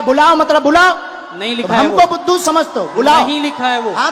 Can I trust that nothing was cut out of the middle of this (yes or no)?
yes